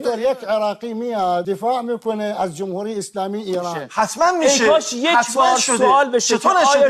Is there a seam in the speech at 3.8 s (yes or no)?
yes